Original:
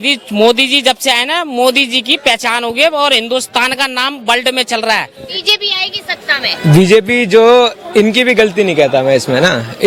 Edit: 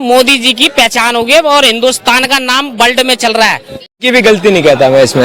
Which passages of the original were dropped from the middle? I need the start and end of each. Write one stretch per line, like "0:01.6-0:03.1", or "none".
0:05.5-0:08.2